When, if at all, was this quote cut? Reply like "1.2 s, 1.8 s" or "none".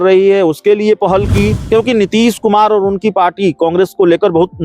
1.6 s

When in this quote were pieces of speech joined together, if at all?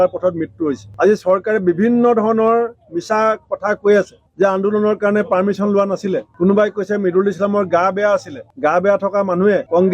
8.4 s

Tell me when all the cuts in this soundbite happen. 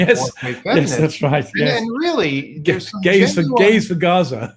none

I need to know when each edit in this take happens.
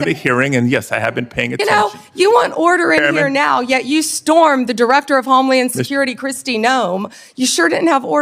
none

